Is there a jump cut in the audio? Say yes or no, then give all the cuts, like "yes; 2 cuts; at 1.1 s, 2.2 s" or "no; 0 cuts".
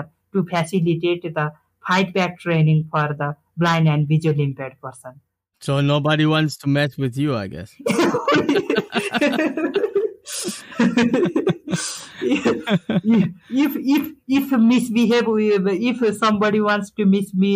no; 0 cuts